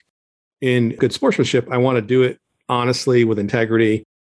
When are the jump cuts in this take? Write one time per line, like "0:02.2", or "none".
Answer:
0:01.0